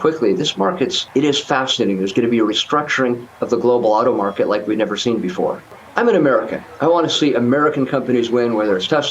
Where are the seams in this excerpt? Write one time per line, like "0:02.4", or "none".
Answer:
0:01.0
0:05.8